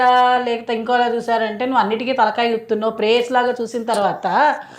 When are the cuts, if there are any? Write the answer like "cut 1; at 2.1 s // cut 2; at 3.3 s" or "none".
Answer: none

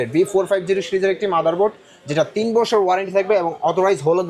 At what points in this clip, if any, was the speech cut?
none

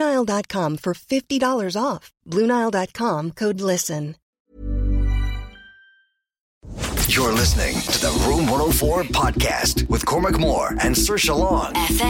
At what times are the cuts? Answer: cut 1; at 4.3 s // cut 2; at 6.8 s

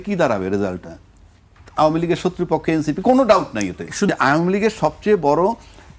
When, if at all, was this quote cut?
cut 1; at 4.1 s

